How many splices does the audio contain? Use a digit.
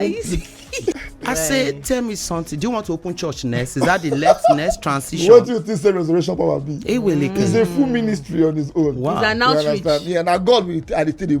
1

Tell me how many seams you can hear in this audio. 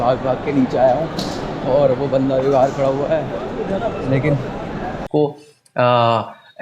1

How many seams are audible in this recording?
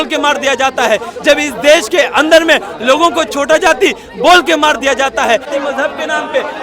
1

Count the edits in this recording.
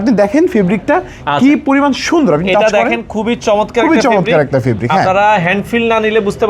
0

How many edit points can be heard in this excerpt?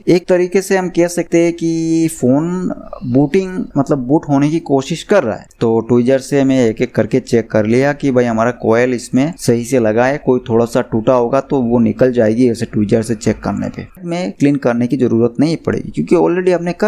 2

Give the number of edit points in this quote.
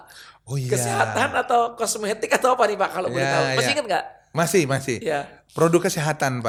0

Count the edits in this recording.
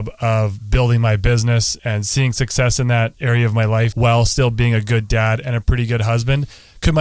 2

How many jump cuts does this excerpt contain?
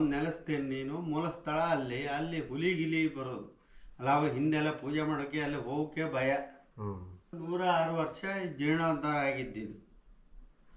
1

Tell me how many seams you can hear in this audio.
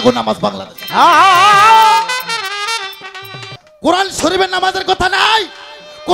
1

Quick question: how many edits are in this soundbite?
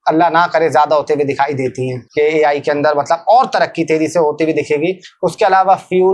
2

